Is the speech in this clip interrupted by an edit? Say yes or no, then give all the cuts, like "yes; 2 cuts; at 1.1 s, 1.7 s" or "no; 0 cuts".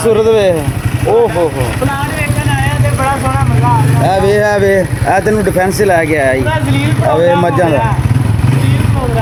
no; 0 cuts